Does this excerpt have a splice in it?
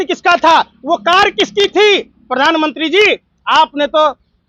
no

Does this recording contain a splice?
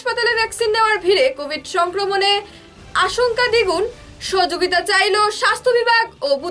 no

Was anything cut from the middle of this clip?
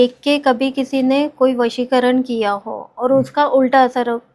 no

